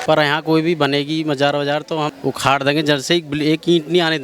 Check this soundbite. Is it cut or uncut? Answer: cut